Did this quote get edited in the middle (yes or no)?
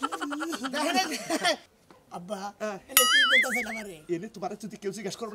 yes